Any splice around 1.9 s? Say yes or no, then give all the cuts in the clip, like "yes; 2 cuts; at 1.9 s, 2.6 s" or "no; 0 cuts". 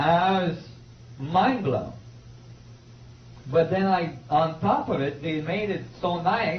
yes; 1 cut; at 1.9 s